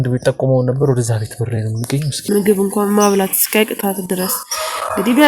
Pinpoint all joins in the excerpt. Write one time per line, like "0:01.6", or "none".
0:02.1